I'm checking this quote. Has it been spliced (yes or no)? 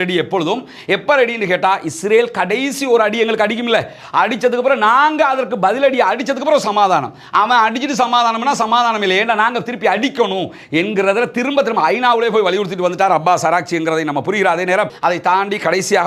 yes